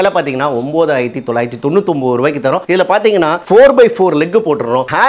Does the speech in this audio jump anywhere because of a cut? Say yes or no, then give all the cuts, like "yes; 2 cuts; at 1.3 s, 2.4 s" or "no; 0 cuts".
no; 0 cuts